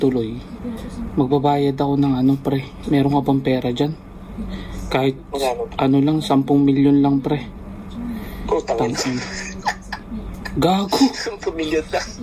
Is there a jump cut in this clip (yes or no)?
no